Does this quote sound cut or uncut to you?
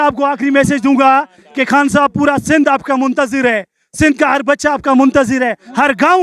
uncut